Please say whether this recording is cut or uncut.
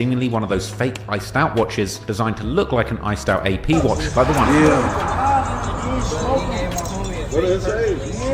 cut